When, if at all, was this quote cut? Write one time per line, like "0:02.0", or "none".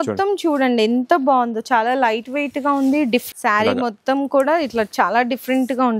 0:03.3